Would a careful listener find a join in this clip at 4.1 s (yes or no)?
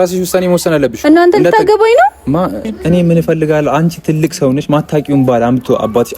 no